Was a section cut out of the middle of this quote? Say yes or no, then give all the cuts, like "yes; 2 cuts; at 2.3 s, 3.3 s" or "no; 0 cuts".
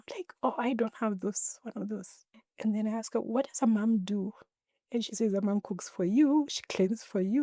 no; 0 cuts